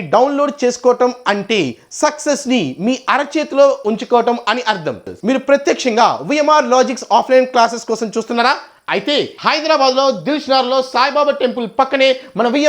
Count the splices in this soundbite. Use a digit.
1